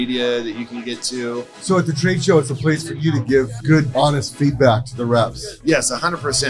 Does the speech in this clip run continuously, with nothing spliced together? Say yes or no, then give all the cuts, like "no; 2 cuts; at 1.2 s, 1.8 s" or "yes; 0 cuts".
no; 3 cuts; at 1.5 s, 3.7 s, 5.5 s